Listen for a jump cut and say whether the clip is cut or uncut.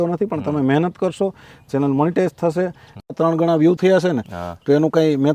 cut